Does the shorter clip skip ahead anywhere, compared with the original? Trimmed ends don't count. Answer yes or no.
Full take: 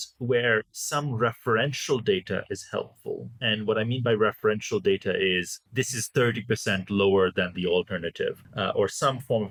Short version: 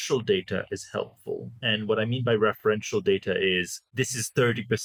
no